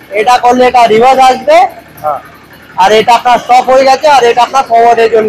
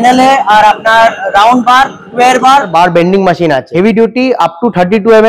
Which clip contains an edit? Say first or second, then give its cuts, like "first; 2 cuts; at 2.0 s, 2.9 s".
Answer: second; 2 cuts; at 2.7 s, 3.7 s